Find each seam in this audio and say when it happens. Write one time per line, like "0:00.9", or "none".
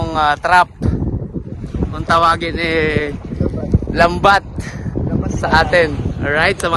none